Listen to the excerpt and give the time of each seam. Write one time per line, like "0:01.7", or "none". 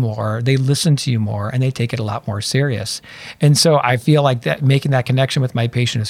none